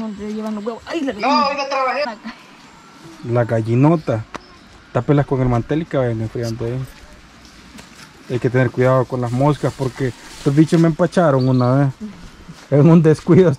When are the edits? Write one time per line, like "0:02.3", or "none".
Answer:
0:02.1